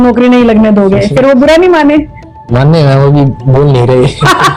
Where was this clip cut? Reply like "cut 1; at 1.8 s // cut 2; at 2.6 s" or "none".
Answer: none